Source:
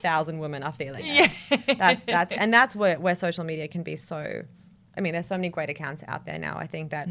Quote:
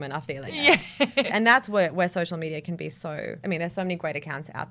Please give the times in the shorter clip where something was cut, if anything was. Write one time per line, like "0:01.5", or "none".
0:01.3
0:03.4